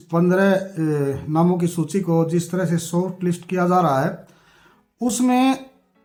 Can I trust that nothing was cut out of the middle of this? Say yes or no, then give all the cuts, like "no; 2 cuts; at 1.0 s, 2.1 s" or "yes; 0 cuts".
yes; 0 cuts